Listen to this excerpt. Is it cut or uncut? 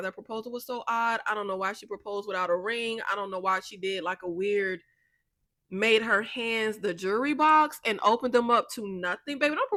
uncut